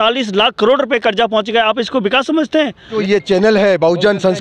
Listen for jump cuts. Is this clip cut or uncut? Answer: cut